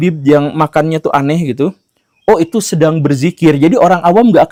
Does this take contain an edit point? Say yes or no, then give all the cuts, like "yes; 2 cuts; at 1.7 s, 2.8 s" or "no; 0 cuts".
no; 0 cuts